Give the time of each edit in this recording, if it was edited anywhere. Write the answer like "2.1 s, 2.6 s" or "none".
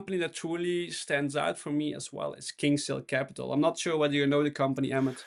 none